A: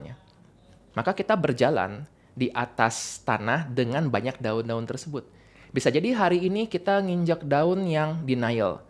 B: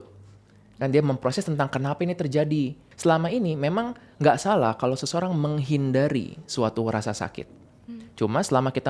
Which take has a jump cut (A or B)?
B